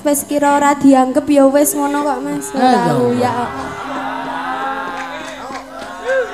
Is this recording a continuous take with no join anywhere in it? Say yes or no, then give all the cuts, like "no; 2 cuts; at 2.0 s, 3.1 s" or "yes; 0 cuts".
yes; 0 cuts